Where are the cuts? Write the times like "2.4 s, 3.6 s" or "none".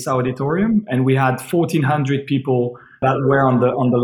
3.0 s